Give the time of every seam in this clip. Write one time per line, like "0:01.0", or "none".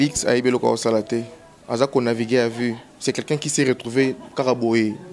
none